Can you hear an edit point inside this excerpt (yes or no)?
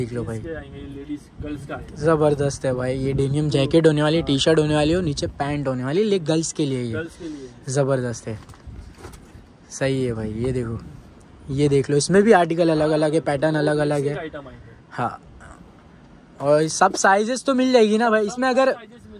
no